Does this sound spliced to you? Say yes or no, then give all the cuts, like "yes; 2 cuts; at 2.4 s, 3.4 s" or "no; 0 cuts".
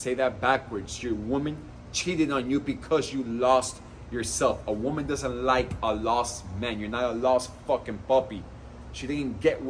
no; 0 cuts